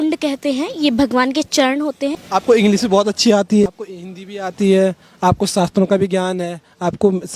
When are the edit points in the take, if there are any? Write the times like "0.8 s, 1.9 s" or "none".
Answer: 2.2 s, 3.7 s